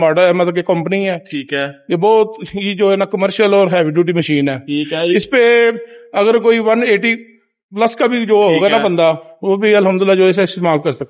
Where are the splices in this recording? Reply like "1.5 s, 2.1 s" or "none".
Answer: none